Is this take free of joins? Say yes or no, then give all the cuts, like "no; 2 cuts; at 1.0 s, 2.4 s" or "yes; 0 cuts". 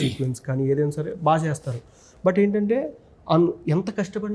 yes; 0 cuts